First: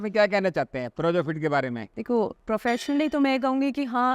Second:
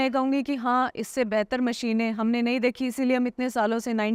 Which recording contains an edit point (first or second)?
first